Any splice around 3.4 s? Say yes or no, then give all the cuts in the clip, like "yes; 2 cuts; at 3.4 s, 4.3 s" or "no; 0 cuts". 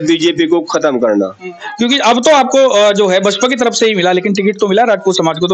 no; 1 cut; at 1.6 s